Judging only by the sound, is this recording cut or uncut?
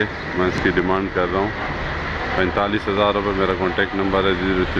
uncut